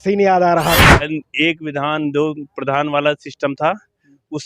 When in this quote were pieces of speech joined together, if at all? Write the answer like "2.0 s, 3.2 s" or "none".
1.1 s